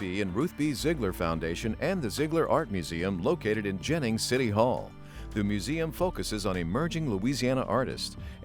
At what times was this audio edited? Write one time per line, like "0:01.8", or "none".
none